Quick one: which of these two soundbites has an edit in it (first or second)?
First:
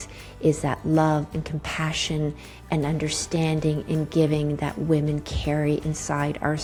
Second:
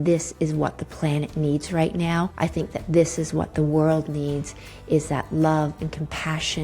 second